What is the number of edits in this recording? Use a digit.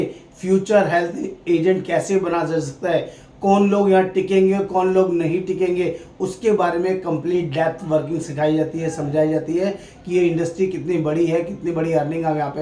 0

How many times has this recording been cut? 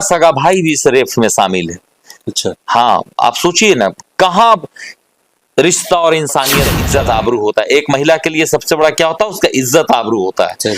1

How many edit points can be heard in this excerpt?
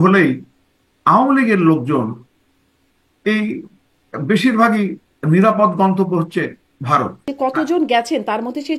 1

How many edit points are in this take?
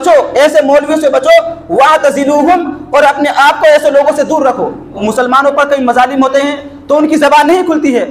1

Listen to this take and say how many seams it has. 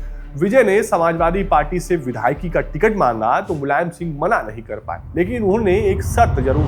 0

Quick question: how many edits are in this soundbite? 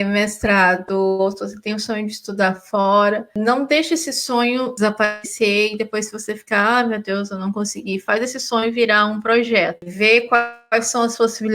3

